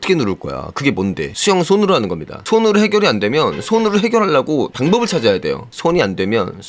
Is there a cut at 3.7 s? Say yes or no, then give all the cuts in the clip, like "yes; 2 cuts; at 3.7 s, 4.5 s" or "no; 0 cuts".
no; 2 cuts; at 1.3 s, 5.7 s